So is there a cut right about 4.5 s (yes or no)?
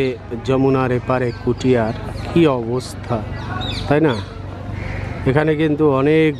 no